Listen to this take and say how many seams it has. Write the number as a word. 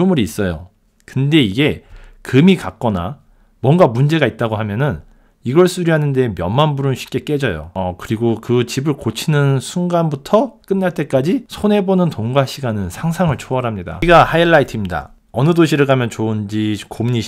one